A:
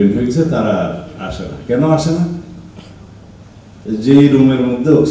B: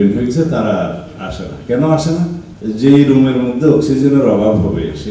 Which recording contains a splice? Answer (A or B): B